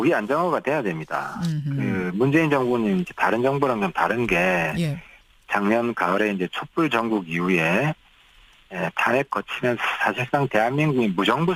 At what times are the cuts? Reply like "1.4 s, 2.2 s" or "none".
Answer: none